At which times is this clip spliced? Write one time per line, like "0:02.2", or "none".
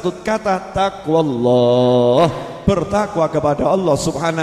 none